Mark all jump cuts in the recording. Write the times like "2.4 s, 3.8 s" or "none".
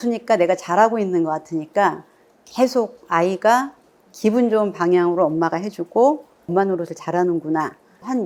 none